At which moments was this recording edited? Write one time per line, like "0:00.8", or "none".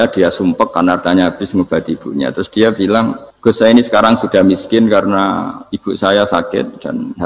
0:03.3